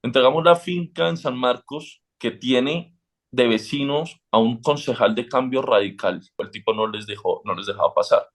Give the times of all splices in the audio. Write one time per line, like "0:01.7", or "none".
0:06.5